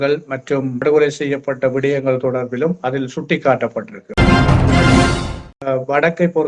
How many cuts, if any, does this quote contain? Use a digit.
3